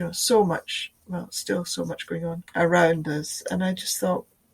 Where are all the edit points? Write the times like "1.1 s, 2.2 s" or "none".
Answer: 2.4 s